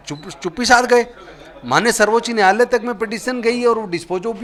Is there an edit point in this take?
no; 0 cuts

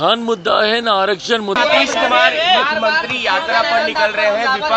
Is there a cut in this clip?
yes; 1 cut; at 1.6 s

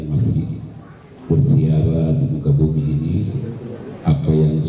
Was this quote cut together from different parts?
no; 0 cuts

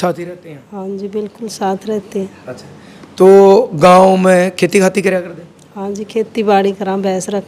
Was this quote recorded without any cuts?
yes; 0 cuts

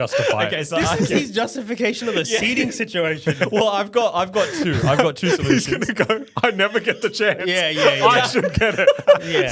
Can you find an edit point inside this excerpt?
no; 0 cuts

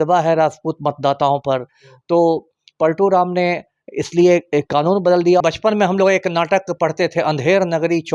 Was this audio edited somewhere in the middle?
yes; 1 cut; at 5.4 s

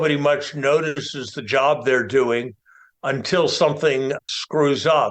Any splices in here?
yes; 1 cut; at 4.2 s

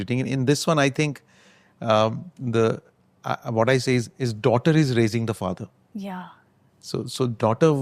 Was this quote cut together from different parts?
no; 0 cuts

